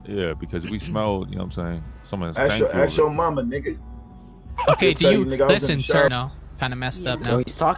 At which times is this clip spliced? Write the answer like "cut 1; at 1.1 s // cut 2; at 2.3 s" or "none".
cut 1; at 6.1 s